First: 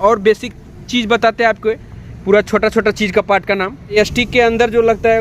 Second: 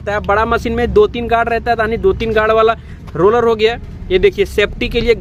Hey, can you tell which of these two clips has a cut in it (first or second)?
first